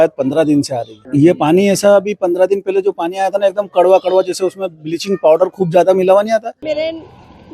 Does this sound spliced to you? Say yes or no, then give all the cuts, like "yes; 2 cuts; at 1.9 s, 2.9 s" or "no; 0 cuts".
yes; 1 cut; at 6.6 s